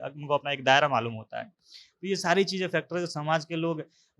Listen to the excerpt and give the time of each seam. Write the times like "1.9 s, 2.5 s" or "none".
none

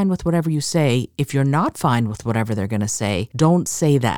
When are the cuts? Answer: 3.3 s

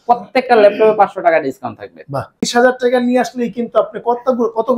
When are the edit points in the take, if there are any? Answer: 2.4 s

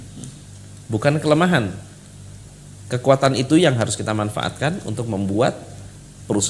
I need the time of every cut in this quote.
none

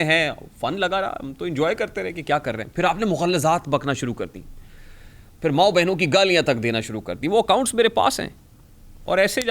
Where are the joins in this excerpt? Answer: none

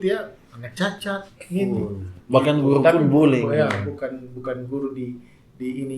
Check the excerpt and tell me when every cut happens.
none

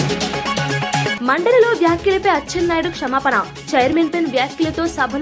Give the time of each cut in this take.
1.1 s

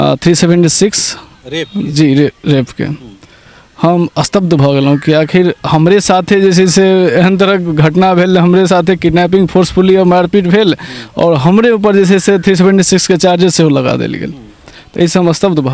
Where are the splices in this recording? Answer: none

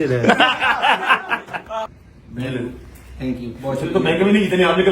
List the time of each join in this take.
1.8 s

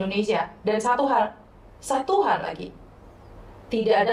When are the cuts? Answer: none

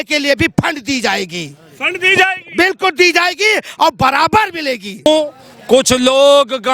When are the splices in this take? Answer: 5.1 s

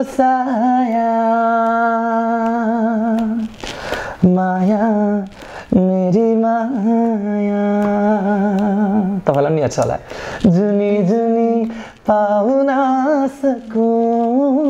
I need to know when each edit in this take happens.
none

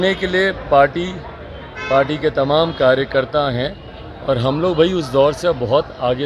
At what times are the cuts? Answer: none

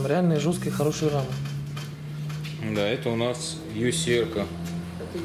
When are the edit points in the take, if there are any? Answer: none

